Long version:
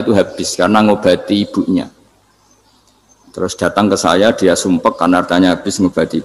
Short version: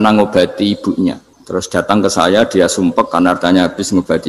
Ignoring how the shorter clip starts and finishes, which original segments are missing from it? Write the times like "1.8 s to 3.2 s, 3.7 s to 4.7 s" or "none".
2.0 s to 3.2 s

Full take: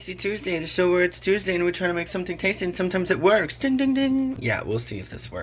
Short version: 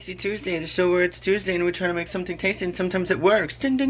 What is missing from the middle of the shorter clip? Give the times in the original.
none

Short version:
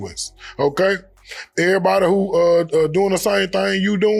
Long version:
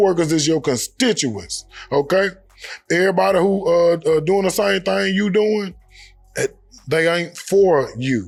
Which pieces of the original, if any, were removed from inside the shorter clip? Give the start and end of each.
none

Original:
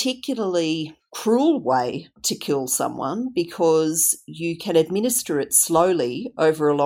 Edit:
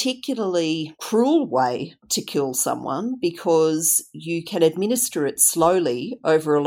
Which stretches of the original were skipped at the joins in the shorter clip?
0.9 s to 1.1 s

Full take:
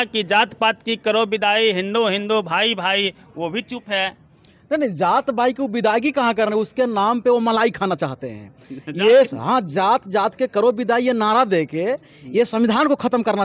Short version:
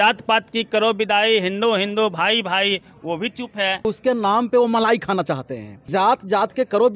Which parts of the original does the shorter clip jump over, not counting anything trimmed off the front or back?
4.2 s to 6.6 s, 8.6 s to 9.7 s

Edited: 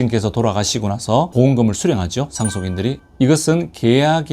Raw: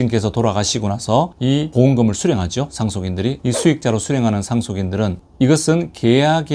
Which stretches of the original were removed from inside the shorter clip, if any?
1.3 s to 1.7 s, 3.4 s to 5.2 s

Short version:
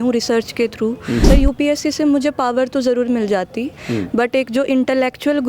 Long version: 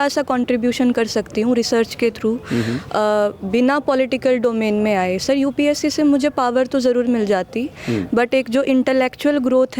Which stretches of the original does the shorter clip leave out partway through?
2.7 s to 5.2 s

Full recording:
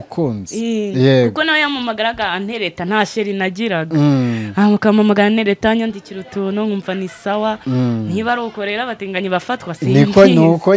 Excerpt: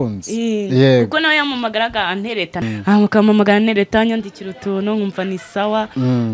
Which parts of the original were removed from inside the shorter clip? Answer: 2.9 s to 4.3 s

